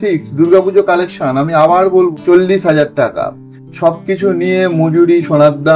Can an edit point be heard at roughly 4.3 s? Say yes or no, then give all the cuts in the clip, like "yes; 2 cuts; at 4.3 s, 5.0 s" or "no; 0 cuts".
no; 1 cut; at 2.1 s